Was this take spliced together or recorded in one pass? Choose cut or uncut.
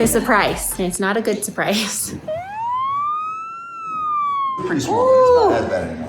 cut